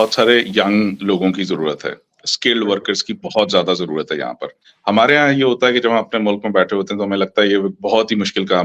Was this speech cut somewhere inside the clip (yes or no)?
yes